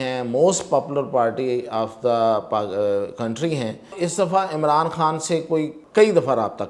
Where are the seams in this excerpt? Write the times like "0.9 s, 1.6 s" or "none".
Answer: 3.9 s, 5.8 s

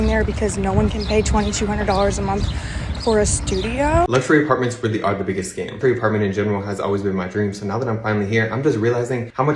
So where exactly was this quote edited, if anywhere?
4.3 s

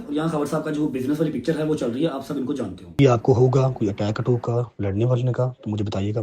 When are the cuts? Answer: 3.0 s

